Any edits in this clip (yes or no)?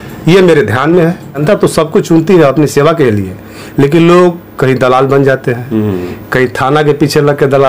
yes